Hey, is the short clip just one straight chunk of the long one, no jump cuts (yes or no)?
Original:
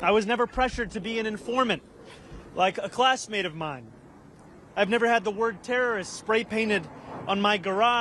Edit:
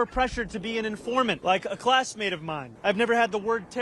no